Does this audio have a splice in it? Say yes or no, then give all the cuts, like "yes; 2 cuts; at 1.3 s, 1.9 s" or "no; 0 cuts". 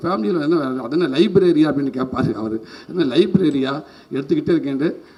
no; 0 cuts